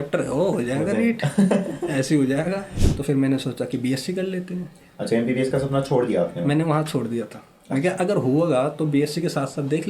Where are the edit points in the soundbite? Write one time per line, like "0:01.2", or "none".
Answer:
0:02.8